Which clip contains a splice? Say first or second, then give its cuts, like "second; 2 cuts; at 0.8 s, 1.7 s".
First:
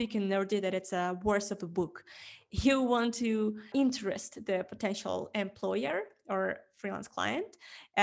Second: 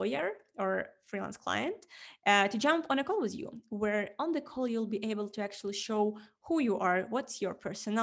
first; 1 cut; at 3.7 s